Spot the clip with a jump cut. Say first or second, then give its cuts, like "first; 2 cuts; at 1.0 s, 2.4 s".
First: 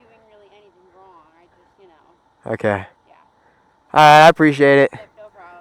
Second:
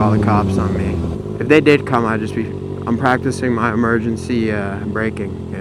second; 1 cut; at 1.1 s